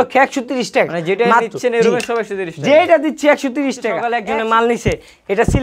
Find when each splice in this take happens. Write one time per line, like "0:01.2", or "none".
0:04.1